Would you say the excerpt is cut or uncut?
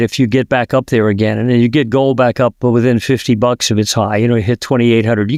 uncut